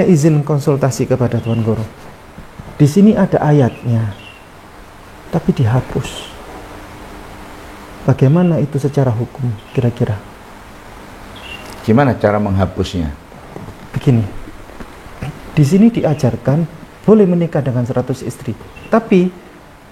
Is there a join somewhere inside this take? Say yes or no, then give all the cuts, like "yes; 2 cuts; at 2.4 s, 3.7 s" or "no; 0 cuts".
no; 0 cuts